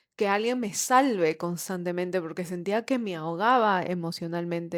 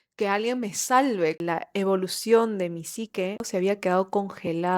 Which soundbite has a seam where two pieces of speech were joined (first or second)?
second